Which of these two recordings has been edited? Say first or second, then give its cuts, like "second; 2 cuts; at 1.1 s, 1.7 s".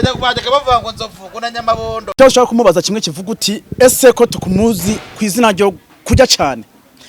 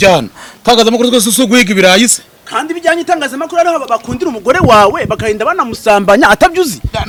first; 1 cut; at 2.1 s